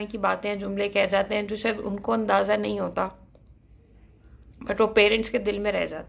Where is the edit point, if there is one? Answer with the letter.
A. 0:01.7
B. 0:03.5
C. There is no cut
C